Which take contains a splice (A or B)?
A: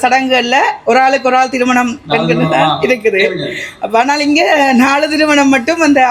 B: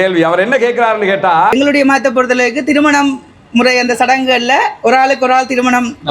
B